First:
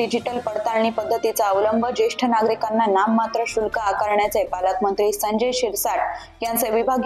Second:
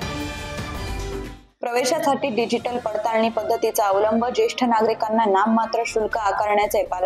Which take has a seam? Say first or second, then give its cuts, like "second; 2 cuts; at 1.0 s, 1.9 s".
second; 1 cut; at 1.4 s